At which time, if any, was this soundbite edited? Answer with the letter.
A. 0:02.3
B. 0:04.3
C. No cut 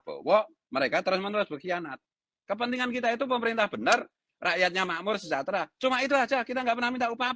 A